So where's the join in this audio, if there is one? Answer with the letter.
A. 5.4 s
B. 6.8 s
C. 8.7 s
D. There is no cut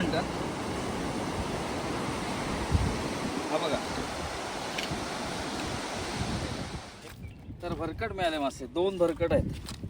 B